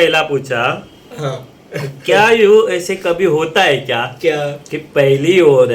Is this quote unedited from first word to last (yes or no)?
yes